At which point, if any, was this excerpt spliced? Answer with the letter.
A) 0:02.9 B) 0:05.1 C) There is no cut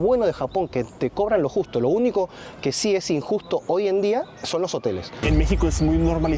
B